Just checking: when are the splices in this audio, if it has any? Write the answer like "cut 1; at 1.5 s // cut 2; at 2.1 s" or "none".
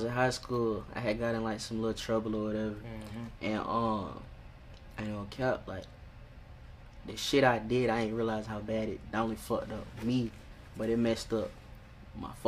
none